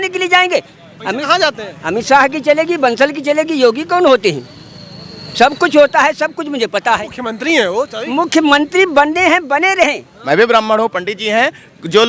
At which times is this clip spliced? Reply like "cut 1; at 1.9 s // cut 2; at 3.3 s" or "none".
cut 1; at 10.1 s